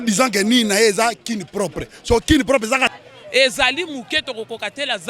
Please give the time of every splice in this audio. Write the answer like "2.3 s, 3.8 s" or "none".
2.9 s